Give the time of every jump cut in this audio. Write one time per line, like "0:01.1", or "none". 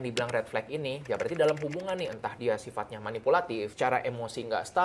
0:03.7